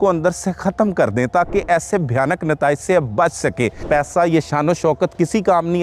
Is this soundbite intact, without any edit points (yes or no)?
no